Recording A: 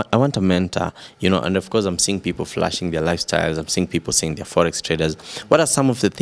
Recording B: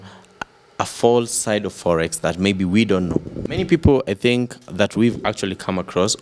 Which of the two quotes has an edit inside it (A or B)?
B